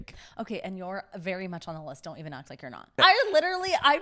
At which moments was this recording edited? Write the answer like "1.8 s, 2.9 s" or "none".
3.0 s